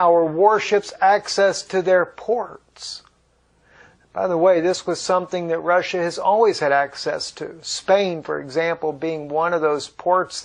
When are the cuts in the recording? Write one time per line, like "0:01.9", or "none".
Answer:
0:03.0